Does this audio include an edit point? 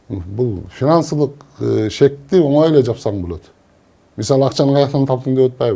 no; 0 cuts

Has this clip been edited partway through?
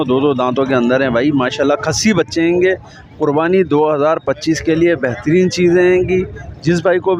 no; 0 cuts

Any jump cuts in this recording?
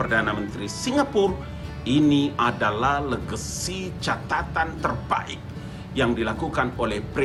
no; 0 cuts

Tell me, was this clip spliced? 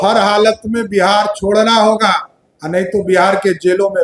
no; 0 cuts

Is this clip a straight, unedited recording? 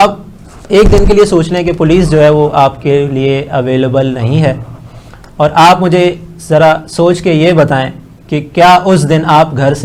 yes; 0 cuts

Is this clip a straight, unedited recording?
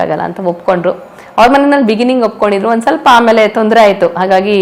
yes; 0 cuts

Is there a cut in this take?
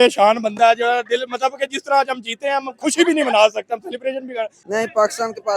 yes; 1 cut; at 4.7 s

